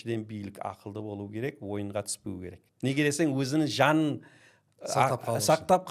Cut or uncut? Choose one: cut